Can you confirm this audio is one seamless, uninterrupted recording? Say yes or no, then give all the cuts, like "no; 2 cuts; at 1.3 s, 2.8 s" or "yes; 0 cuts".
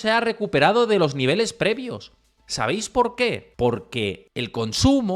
no; 2 cuts; at 3.5 s, 4.2 s